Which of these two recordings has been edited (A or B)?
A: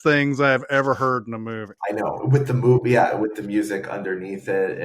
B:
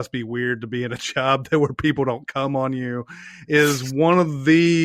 A